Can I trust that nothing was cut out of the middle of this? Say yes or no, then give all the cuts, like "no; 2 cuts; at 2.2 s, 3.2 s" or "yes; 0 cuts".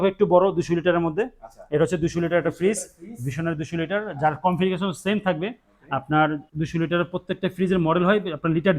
yes; 0 cuts